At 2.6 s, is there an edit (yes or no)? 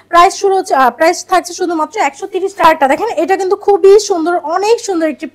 yes